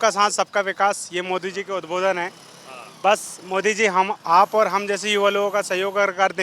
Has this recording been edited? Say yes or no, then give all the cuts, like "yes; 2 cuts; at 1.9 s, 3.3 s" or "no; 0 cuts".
no; 0 cuts